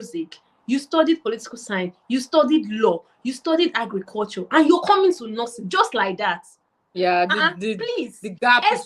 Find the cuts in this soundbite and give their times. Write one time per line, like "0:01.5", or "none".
none